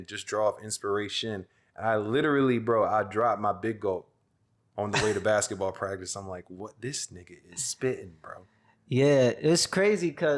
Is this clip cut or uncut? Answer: uncut